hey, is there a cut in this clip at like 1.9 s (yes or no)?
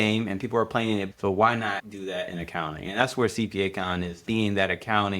yes